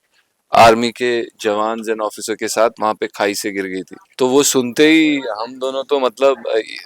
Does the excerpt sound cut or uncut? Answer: cut